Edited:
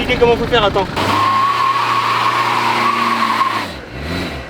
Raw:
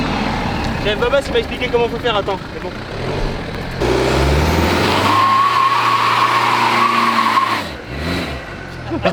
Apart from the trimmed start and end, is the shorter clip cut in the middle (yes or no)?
yes